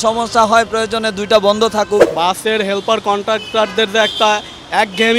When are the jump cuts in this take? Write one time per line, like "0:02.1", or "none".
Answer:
0:02.1

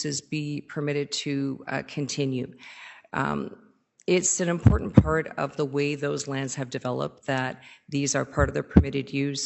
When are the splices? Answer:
none

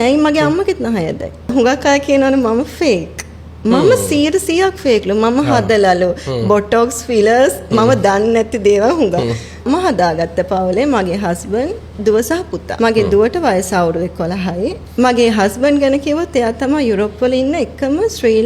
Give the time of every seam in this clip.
0:01.5
0:09.7
0:12.6
0:14.8

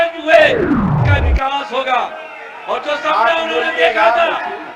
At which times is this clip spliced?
0:01.0

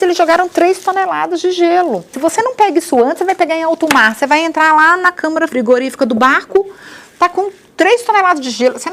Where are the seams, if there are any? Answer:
0:02.1
0:05.5

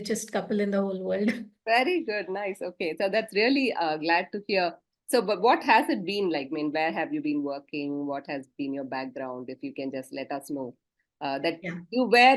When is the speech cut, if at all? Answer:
none

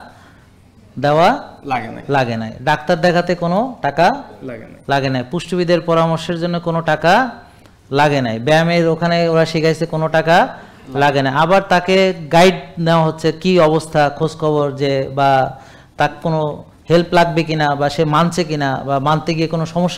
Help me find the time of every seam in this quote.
none

